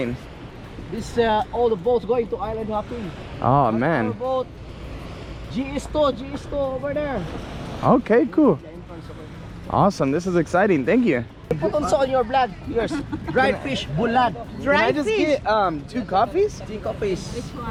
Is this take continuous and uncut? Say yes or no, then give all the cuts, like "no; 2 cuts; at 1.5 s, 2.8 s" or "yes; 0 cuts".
yes; 0 cuts